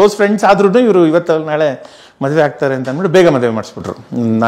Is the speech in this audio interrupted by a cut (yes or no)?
no